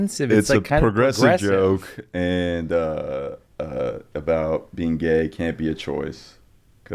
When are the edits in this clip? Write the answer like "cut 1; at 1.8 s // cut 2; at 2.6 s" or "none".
none